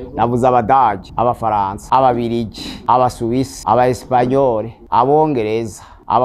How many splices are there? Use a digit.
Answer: 0